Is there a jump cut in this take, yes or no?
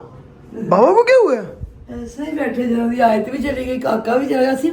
no